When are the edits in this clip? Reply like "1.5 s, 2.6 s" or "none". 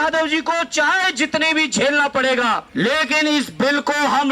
2.7 s